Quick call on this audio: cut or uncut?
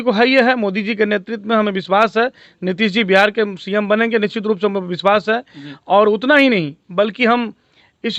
uncut